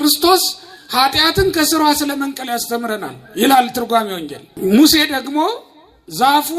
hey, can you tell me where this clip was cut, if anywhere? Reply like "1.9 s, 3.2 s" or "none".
4.5 s